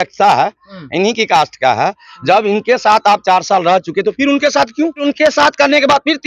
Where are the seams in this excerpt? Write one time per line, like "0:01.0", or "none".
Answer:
0:05.0